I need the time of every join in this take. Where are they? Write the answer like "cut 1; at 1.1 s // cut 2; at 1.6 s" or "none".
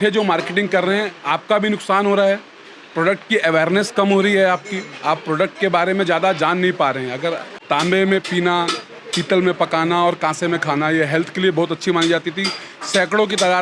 cut 1; at 7.5 s